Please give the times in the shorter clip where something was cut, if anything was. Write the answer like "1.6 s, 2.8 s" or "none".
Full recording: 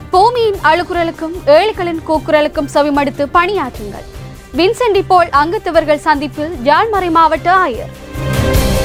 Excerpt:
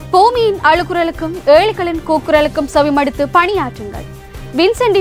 none